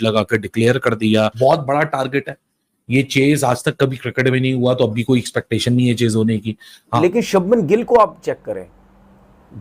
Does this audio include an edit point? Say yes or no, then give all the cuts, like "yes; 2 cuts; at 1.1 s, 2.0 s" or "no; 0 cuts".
yes; 2 cuts; at 1.3 s, 7.0 s